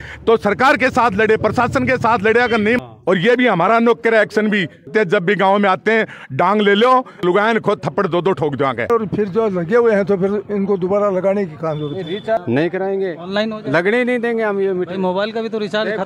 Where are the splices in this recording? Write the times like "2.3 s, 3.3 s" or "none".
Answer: 2.8 s, 4.9 s, 7.2 s, 8.9 s, 12.4 s